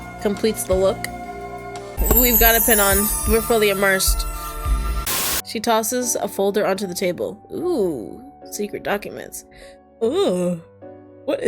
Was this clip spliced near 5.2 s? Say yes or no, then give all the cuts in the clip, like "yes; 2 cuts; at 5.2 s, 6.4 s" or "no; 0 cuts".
yes; 1 cut; at 5.2 s